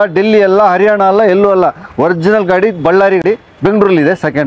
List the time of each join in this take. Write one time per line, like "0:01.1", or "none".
0:03.2